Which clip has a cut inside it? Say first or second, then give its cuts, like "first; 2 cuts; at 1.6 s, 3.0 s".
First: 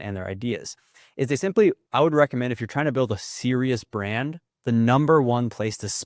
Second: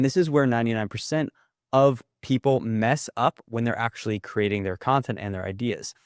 first; 2 cuts; at 1.8 s, 4.4 s